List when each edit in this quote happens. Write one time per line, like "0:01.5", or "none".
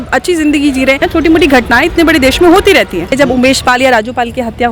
0:01.0
0:03.1